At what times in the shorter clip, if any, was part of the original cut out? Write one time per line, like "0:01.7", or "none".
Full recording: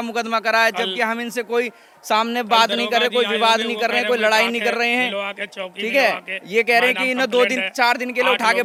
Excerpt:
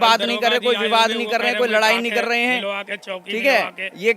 none